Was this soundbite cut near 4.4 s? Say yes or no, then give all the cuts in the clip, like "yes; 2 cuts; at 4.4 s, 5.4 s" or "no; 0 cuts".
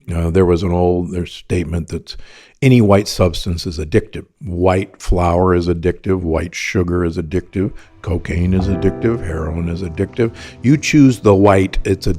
yes; 1 cut; at 4.4 s